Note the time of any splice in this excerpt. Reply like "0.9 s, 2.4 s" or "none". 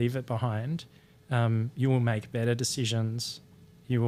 none